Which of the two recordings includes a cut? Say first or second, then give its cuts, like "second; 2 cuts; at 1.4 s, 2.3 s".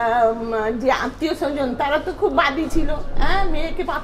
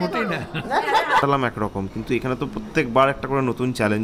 second; 1 cut; at 1.2 s